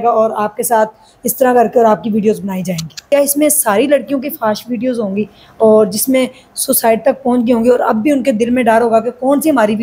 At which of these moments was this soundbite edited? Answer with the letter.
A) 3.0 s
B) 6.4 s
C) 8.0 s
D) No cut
A